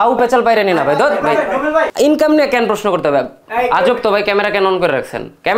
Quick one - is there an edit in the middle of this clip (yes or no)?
yes